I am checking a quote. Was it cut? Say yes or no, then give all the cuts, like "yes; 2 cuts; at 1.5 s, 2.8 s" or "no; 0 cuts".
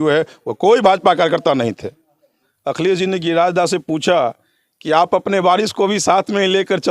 yes; 1 cut; at 2.5 s